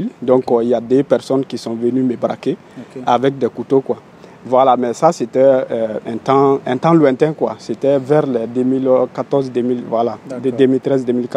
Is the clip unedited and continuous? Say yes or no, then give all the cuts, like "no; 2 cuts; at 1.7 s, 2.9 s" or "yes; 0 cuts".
yes; 0 cuts